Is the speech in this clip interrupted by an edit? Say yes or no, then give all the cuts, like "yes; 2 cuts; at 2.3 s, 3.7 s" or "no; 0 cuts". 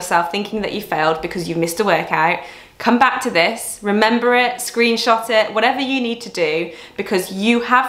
no; 0 cuts